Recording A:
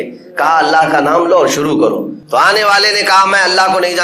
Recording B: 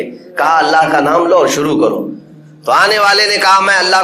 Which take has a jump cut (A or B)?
A